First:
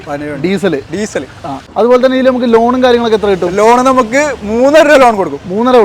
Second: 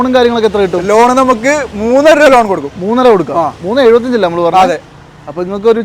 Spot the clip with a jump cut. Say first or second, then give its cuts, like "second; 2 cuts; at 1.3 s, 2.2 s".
first; 1 cut; at 1.7 s